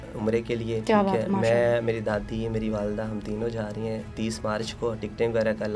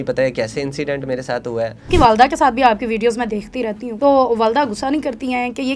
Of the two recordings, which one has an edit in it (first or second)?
second